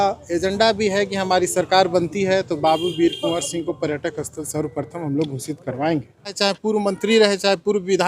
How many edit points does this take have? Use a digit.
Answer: 1